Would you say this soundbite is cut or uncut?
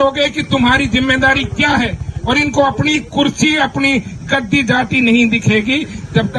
uncut